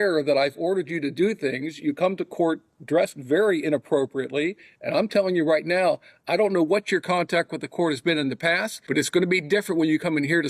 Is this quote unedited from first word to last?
no; 1 cut; at 8.7 s

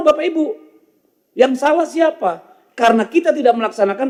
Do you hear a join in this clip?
no; 0 cuts

